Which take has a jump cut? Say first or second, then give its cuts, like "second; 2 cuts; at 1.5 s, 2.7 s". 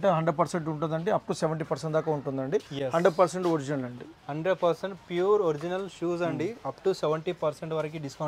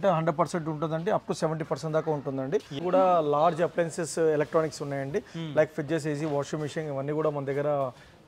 second; 1 cut; at 2.7 s